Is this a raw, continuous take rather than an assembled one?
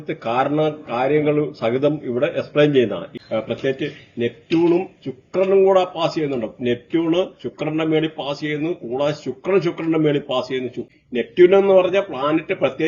no; 2 cuts; at 3.1 s, 10.9 s

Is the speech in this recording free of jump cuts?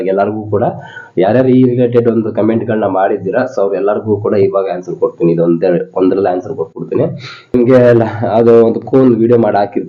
yes; 0 cuts

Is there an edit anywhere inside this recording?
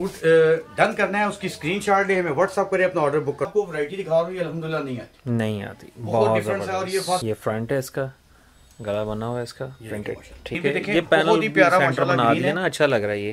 yes; 3 cuts; at 3.5 s, 7.2 s, 10.6 s

